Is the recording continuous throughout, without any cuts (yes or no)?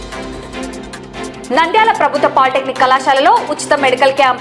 yes